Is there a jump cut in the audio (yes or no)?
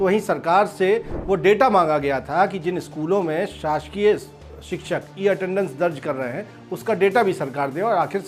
no